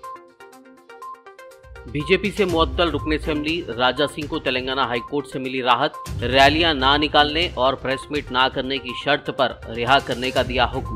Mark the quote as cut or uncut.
uncut